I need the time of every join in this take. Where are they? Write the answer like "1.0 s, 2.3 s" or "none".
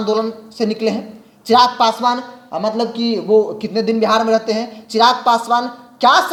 none